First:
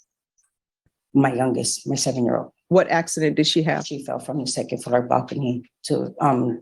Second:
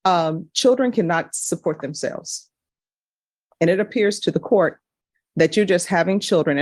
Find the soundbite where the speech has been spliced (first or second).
first